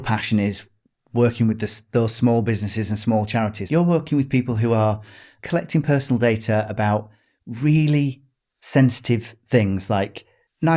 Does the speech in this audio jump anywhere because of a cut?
yes; 2 cuts; at 3.6 s, 5.3 s

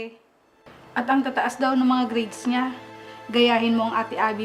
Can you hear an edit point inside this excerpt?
no; 0 cuts

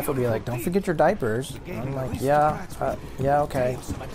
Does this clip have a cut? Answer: no; 0 cuts

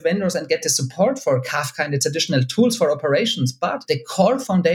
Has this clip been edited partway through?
no; 0 cuts

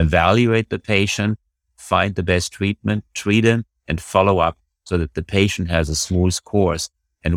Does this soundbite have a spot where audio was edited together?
no; 0 cuts

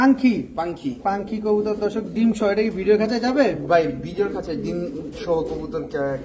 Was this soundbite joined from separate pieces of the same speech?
no; 0 cuts

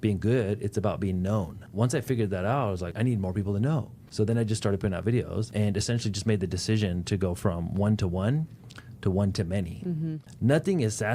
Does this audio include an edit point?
yes; 5 cuts; at 1.6 s, 2.9 s, 4.0 s, 5.5 s, 10.2 s

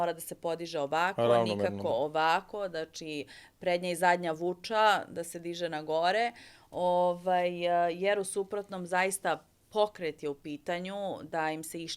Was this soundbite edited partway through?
no; 0 cuts

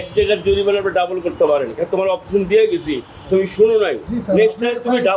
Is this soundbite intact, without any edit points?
yes; 0 cuts

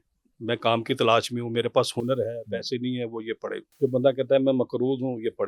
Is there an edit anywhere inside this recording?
yes; 1 cut; at 3.7 s

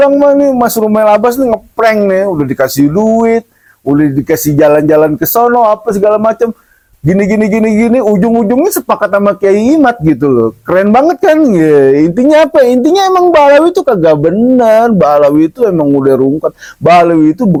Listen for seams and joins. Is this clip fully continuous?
yes; 0 cuts

